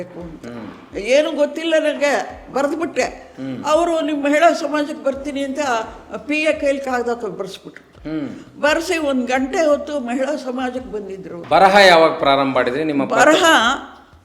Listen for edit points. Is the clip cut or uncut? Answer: cut